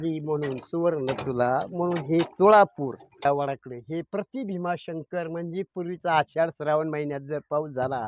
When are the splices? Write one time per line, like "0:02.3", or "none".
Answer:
0:03.2

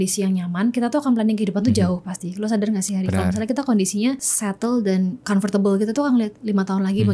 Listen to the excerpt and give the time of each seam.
0:04.3

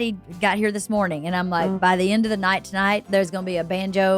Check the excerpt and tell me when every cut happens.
0:01.8
0:03.0

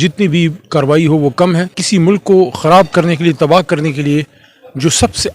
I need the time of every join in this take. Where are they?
0:01.7

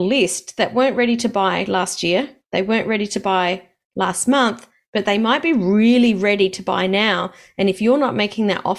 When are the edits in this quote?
none

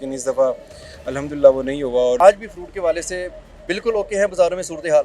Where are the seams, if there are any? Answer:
0:02.2

